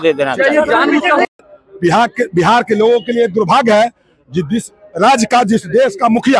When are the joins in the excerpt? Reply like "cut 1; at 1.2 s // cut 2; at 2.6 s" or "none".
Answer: cut 1; at 1.5 s